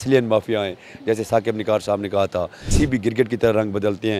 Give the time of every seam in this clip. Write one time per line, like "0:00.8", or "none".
0:02.6